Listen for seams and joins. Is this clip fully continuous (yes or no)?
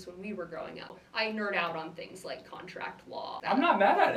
no